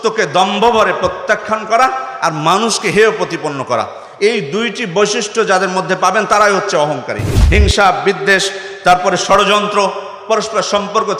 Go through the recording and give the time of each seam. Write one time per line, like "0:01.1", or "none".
0:07.3